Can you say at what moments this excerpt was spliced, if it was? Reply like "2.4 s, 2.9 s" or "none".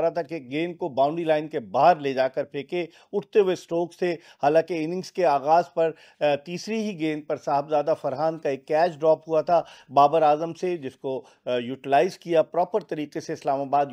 none